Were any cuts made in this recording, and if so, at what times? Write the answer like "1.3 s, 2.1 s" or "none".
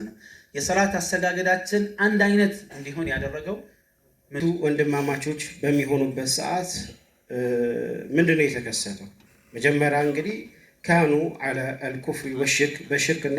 4.4 s